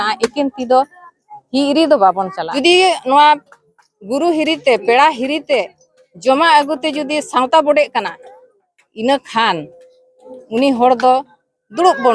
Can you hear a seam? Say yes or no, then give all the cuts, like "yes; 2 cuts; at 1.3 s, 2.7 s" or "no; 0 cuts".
yes; 1 cut; at 2.4 s